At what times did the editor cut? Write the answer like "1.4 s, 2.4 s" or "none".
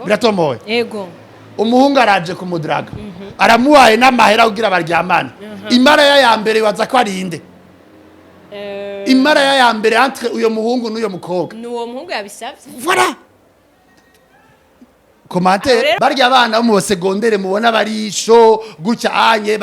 16.0 s